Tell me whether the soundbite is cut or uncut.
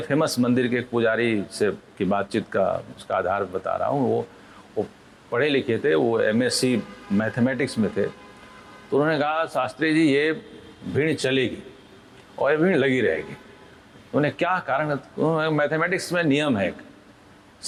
uncut